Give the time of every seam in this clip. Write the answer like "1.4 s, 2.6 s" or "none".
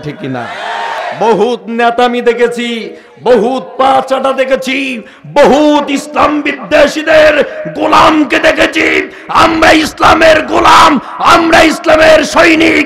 1.0 s